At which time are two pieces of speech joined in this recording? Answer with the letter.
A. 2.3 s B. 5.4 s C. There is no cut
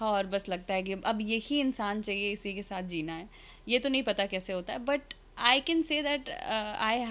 C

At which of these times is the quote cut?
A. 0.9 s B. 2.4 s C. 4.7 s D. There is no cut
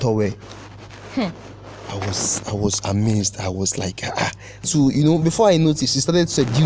C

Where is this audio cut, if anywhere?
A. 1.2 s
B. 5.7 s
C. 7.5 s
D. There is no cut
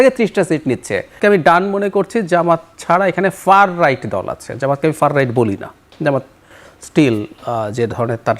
A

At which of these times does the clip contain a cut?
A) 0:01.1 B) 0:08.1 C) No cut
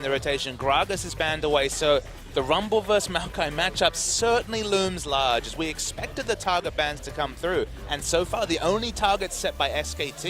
B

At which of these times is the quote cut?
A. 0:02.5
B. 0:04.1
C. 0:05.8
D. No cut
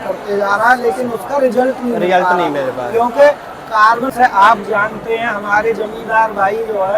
B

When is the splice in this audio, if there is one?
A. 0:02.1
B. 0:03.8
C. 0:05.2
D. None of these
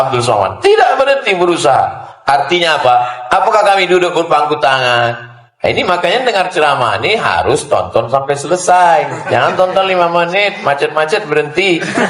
A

